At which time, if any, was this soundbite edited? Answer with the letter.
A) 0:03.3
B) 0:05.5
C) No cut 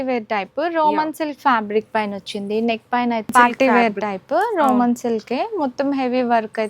A